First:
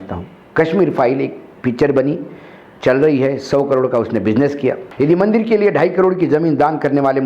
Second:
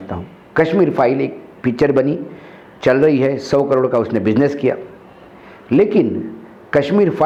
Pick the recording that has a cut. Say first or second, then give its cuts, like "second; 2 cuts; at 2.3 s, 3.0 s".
first; 1 cut; at 4.9 s